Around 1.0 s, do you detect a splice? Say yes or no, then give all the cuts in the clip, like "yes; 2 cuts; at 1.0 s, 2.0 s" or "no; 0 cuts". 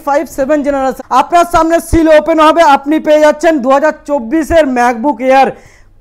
yes; 1 cut; at 1.0 s